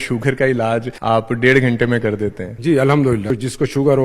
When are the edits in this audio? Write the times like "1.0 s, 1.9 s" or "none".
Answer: 0.9 s, 2.5 s, 3.3 s